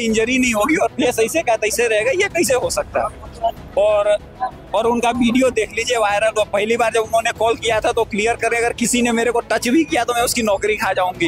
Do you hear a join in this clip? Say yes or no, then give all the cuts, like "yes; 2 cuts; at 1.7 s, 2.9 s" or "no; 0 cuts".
no; 0 cuts